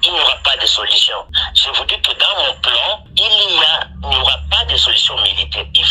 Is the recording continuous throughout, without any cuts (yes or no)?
no